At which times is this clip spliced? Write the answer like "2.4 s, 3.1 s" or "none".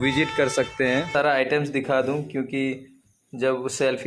1.2 s